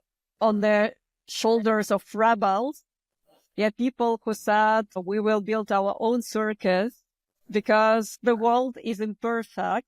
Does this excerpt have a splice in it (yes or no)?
yes